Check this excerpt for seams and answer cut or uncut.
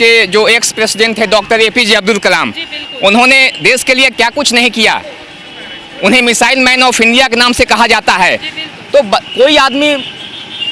uncut